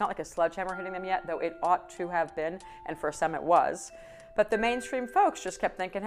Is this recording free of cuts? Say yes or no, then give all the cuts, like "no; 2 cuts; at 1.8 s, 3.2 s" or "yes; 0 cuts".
yes; 0 cuts